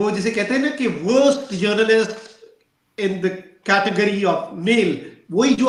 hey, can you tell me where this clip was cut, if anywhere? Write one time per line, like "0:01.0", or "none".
none

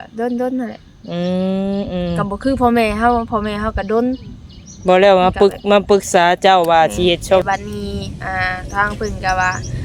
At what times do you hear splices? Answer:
0:07.4

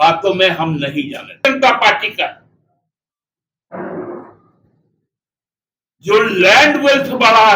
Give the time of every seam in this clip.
0:01.4

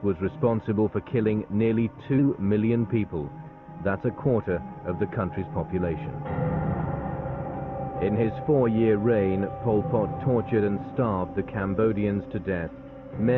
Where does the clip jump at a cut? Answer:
none

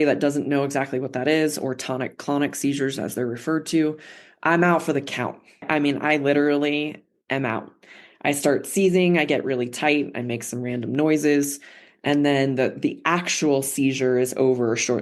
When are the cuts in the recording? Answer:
0:05.7

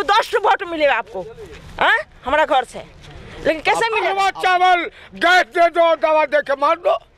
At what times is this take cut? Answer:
0:04.1

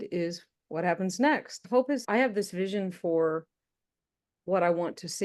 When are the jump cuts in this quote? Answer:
0:01.9

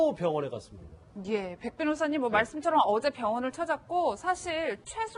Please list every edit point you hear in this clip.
none

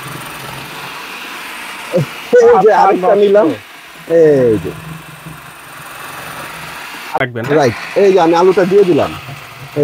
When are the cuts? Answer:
0:07.2

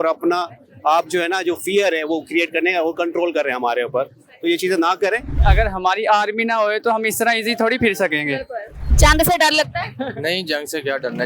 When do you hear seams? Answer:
0:05.4
0:08.8

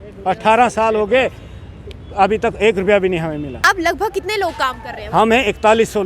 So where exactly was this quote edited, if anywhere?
0:03.6

